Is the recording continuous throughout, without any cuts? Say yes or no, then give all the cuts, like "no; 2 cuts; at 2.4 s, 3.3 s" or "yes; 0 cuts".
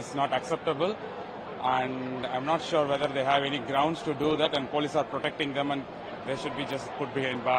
yes; 0 cuts